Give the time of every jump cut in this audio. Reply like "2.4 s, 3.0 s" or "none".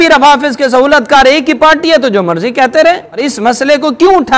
3.2 s